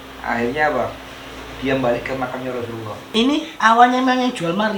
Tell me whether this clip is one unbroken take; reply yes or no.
no